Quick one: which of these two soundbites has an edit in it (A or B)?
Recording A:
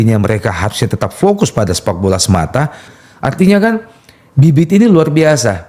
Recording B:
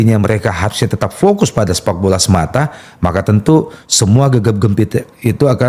A